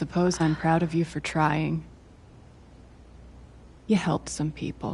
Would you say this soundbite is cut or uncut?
cut